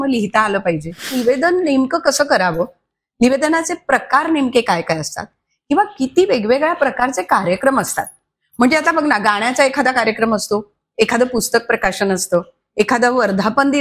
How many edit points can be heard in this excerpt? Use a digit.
1